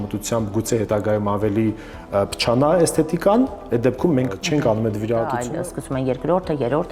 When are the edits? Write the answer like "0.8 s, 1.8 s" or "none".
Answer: 4.4 s, 5.4 s